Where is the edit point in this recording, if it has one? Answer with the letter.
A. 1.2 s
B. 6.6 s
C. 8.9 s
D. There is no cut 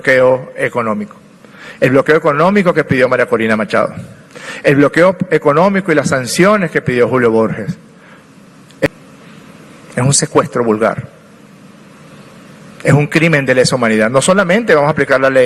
C